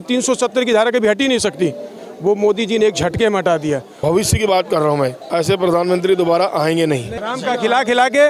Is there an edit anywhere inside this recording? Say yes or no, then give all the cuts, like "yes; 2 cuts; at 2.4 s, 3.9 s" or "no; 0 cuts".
yes; 3 cuts; at 3.9 s, 5.2 s, 7.2 s